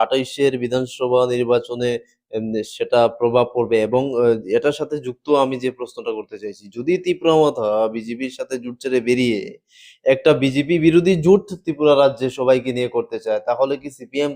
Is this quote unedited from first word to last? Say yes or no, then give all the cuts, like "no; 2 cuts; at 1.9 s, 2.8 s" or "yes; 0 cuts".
yes; 0 cuts